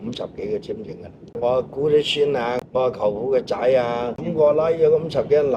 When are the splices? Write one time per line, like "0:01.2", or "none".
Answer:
0:01.3
0:02.6
0:04.3